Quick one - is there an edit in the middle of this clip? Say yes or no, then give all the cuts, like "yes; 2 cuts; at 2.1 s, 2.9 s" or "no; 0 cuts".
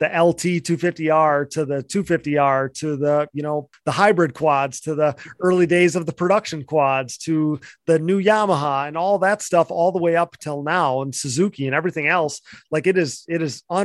yes; 1 cut; at 3.7 s